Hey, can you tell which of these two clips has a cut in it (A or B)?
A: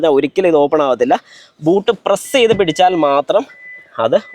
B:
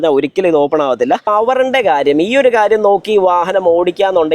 B